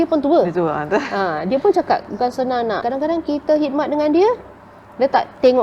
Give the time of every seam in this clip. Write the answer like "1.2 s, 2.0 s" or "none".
2.8 s